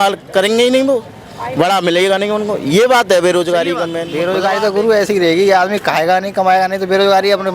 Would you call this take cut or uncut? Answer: cut